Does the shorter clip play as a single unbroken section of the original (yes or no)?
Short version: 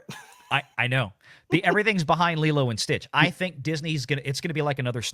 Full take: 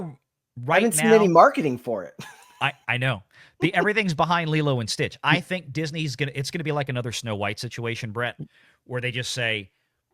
yes